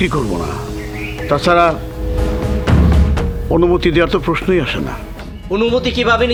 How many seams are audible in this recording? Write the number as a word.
zero